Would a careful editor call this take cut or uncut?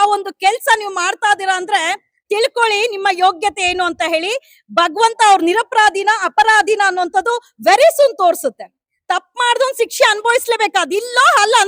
uncut